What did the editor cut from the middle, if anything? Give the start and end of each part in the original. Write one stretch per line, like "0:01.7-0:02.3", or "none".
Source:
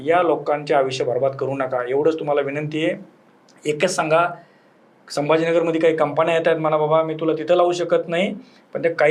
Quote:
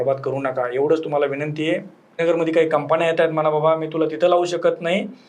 0:03.3-0:05.5